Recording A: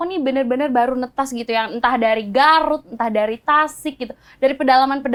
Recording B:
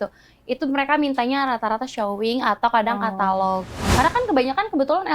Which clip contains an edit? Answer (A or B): B